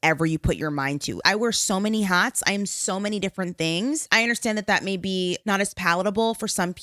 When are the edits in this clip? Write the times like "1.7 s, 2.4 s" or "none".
1.1 s, 4.1 s, 5.5 s

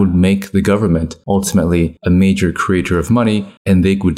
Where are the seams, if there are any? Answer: 1.1 s, 2.0 s

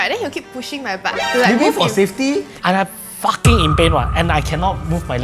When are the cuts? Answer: 2.5 s

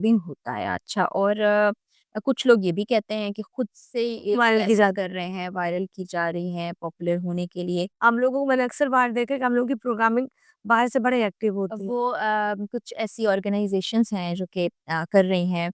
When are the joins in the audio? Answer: 7.9 s

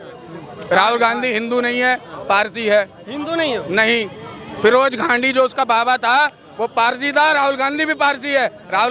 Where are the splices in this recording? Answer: none

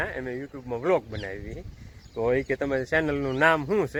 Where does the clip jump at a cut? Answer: none

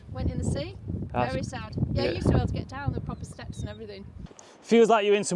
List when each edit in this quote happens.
4.2 s

